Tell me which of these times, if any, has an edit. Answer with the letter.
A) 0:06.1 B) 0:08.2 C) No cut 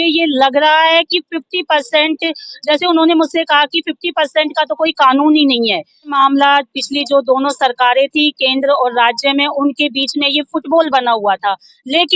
A